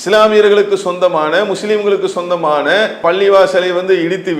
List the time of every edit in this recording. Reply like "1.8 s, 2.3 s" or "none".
none

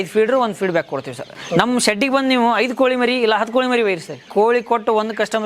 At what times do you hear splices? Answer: 1.4 s, 4.3 s

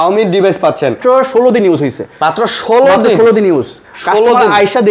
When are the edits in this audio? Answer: 1.0 s

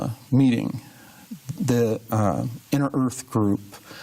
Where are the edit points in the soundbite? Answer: 1.6 s

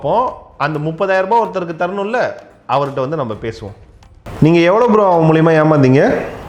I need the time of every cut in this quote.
4.2 s

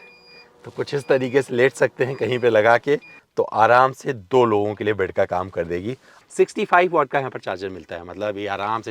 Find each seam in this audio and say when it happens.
3.2 s, 6.2 s

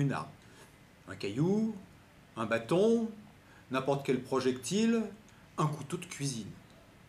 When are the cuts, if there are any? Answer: none

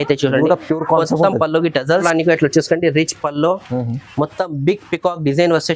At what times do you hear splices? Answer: 2.0 s

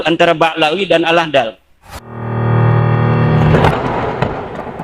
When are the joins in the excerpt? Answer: 2.0 s

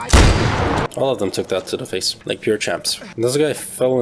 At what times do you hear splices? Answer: 3.0 s

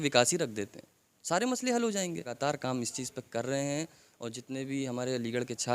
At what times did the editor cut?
2.4 s

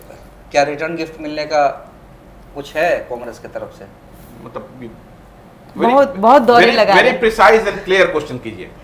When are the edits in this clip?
none

